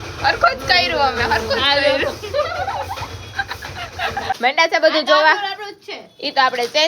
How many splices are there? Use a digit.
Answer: 1